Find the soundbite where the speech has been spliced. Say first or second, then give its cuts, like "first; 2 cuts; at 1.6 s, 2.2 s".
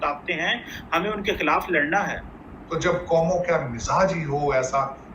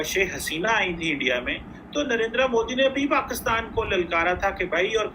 first; 1 cut; at 2.3 s